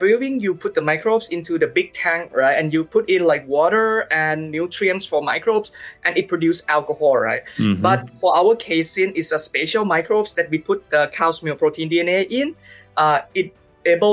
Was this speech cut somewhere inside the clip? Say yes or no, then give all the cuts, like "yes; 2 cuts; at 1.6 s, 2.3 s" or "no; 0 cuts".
no; 0 cuts